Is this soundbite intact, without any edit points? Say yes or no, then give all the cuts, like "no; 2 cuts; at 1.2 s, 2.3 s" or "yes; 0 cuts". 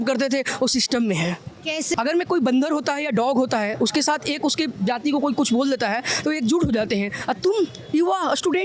no; 1 cut; at 1.9 s